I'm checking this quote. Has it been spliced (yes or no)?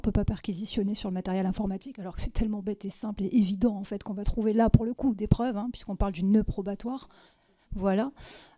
no